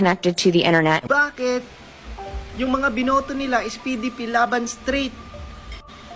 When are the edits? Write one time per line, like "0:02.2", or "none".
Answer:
0:01.0